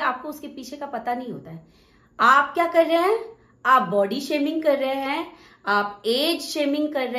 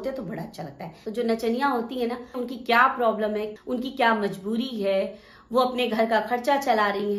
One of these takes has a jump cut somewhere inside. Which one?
second; 3 cuts; at 0.9 s, 2.3 s, 3.5 s

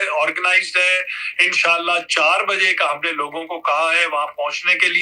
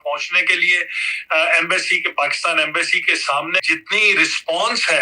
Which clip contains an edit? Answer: second; 1 cut; at 3.7 s

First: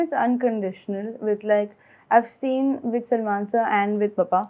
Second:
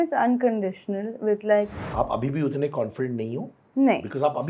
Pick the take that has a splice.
second; 1 cut; at 1.8 s

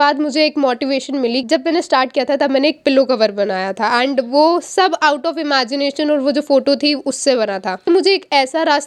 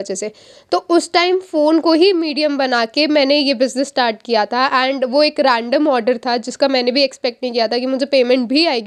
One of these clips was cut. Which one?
first; 2 cuts; at 1.4 s, 7.9 s

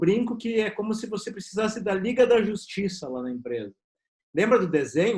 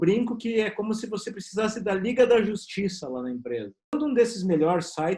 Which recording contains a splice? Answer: second; 1 cut; at 3.9 s

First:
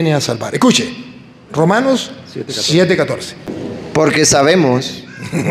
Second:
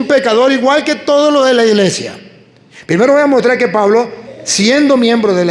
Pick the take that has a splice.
first; 1 cut; at 3.5 s

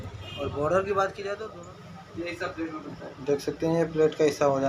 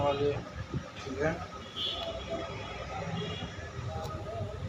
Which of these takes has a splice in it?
first; 1 cut; at 1.4 s

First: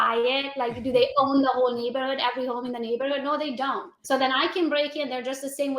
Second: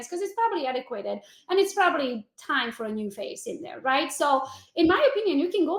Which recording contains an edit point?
first; 1 cut; at 3.9 s

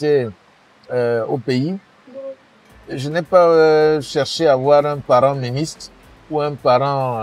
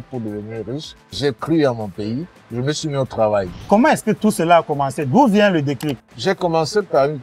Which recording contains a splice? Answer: second; 3 cuts; at 1.1 s, 3.5 s, 6.1 s

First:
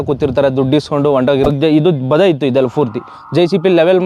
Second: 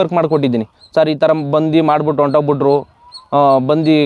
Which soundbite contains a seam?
first; 1 cut; at 1.5 s

